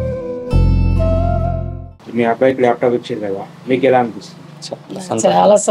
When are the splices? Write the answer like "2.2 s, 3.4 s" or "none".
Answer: 1.9 s